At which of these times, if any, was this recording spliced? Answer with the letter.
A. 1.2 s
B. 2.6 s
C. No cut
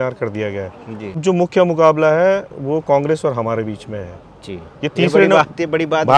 A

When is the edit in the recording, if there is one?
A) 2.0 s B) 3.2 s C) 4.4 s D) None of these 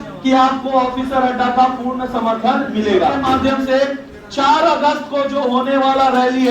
B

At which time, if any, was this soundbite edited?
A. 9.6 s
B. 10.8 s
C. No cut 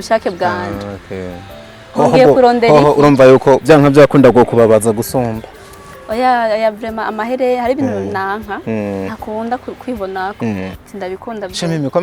B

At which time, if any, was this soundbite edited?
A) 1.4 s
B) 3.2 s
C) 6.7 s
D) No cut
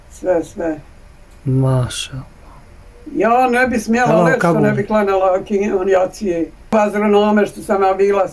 C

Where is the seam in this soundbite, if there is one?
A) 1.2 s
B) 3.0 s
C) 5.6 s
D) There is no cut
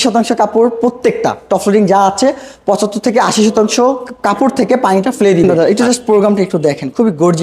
C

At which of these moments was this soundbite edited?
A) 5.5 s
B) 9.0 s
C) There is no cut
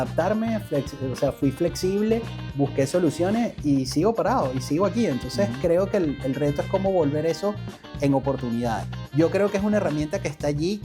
B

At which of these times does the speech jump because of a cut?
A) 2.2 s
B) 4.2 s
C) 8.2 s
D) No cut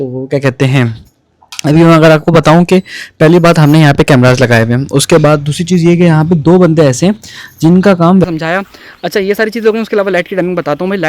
C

